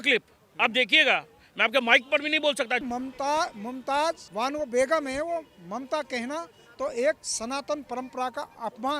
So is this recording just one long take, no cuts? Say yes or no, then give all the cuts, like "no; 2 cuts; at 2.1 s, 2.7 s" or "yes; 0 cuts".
no; 2 cuts; at 2.8 s, 4.3 s